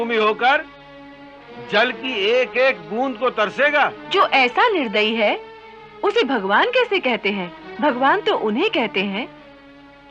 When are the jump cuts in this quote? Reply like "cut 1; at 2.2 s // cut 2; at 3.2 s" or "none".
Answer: cut 1; at 4.0 s // cut 2; at 7.6 s

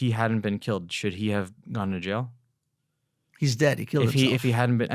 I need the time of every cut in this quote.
none

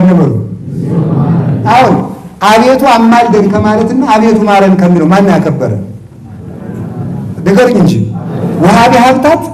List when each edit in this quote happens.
none

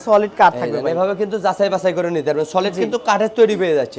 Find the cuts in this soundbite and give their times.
none

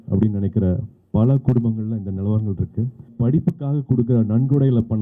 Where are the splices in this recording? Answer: cut 1; at 3.1 s

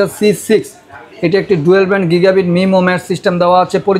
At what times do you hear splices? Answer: none

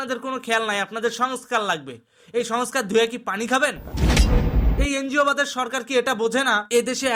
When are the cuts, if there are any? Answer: none

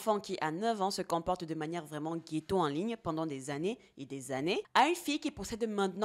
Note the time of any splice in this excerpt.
cut 1; at 4.7 s

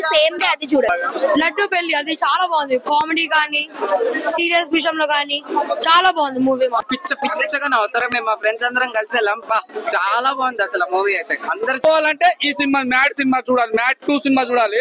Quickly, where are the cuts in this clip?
cut 1; at 0.9 s // cut 2; at 6.8 s // cut 3; at 11.8 s

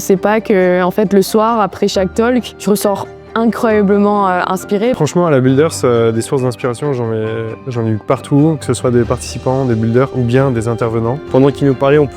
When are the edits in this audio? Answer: cut 1; at 4.9 s // cut 2; at 11.2 s

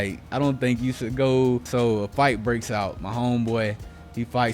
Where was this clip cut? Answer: cut 1; at 1.7 s

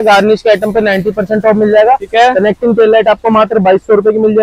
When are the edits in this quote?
none

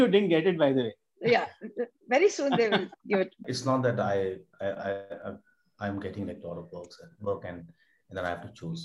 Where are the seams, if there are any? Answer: cut 1; at 3.5 s

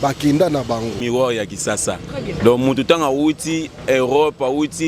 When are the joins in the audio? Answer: cut 1; at 1.0 s

